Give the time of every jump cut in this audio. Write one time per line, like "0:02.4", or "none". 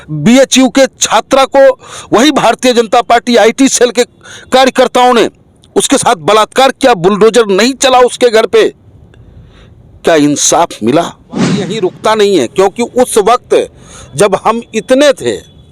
0:11.7